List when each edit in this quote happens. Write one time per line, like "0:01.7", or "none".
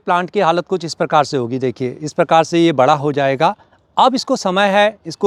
none